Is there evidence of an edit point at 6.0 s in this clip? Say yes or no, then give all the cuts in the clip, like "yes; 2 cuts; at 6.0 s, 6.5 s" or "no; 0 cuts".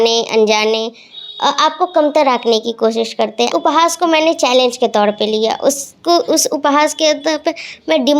no; 1 cut; at 3.5 s